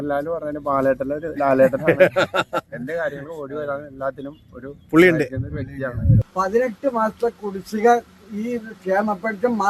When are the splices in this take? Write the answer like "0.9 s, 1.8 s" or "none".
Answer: 6.2 s